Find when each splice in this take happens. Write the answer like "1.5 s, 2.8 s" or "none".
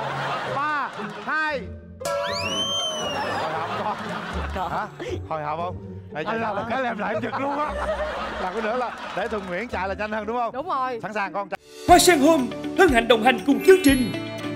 11.5 s